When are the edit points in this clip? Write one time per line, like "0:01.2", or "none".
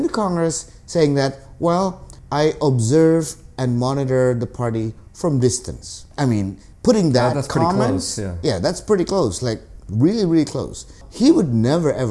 none